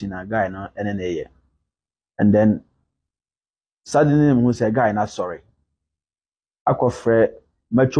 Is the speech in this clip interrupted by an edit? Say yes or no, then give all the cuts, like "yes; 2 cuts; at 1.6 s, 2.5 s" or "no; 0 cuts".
no; 0 cuts